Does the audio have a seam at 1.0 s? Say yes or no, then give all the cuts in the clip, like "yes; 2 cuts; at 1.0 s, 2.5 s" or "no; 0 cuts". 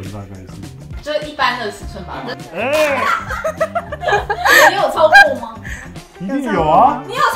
yes; 1 cut; at 1.0 s